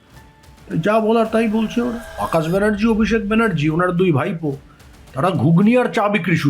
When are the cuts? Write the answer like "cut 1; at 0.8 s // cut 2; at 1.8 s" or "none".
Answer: cut 1; at 2.2 s

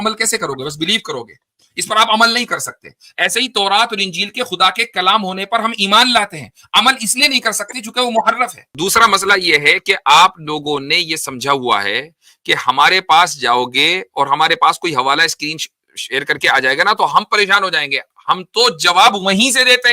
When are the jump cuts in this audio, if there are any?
cut 1; at 8.6 s

